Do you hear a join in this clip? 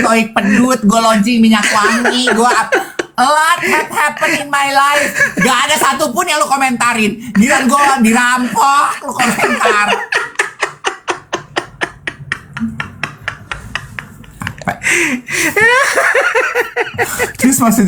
no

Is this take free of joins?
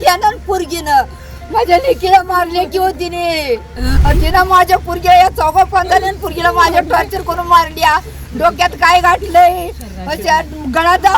no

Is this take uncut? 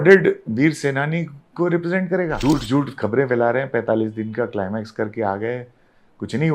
no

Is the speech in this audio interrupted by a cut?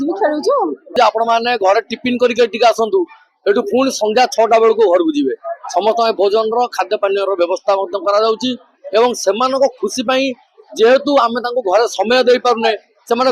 yes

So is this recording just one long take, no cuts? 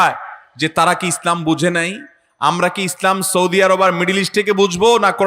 yes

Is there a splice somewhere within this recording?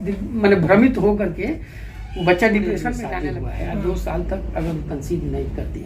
yes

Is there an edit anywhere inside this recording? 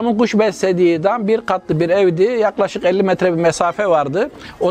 no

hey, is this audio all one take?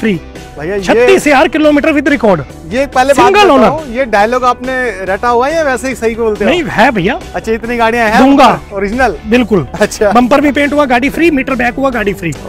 yes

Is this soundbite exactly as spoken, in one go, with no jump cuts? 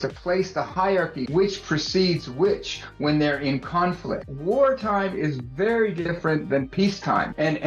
no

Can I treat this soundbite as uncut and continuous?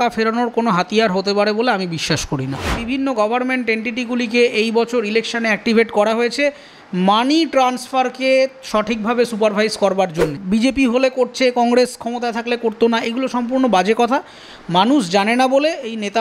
no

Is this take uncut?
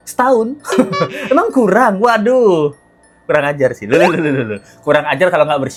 yes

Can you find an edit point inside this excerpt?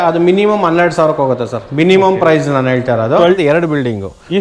yes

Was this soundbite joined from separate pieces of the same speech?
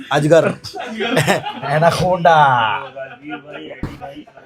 no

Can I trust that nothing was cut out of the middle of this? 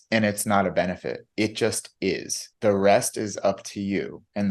yes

